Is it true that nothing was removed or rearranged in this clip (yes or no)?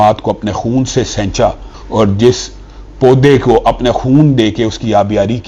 no